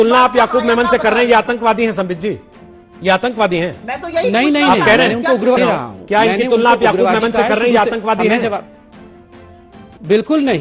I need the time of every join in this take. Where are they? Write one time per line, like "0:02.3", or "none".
none